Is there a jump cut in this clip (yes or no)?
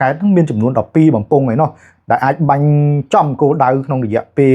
no